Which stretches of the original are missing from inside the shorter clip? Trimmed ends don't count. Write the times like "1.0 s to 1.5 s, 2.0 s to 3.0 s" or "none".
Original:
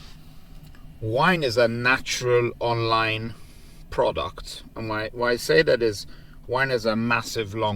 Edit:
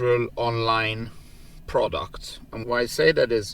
4.8 s to 5.1 s

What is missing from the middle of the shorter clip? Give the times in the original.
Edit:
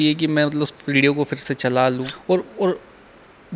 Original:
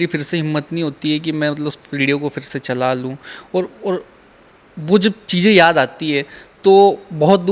3.2 s to 3.4 s

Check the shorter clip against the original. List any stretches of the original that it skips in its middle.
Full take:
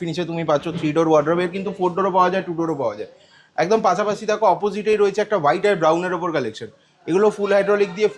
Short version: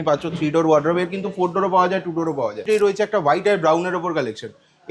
3.0 s to 4.8 s

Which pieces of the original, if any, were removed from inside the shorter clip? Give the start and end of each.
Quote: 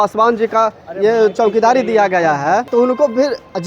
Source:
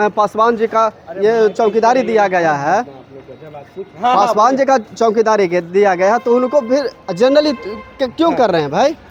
2.9 s to 6.2 s

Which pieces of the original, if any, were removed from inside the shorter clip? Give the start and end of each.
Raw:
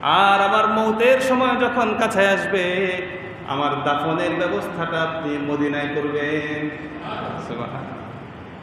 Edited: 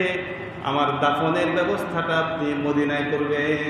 none

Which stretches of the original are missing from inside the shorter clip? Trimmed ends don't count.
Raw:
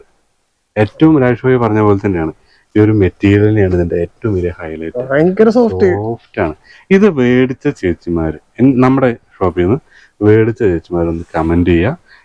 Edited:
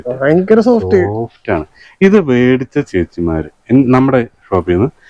none

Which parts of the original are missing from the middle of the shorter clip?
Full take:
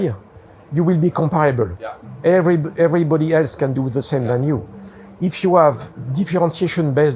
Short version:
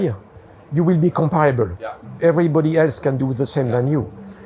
2.1 s to 2.7 s

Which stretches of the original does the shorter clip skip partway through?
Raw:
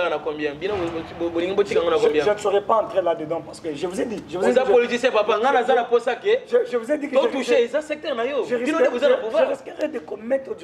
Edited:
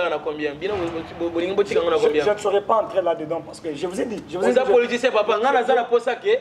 none

